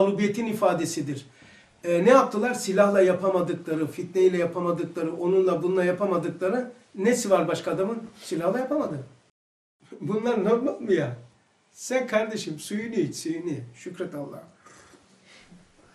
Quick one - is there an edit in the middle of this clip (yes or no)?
yes